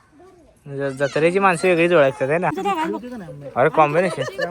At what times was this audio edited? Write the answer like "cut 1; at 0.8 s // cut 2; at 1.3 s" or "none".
cut 1; at 2.6 s